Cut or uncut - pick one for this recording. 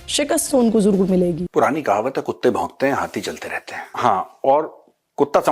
cut